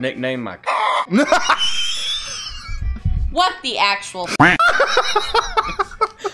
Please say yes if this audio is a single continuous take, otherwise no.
yes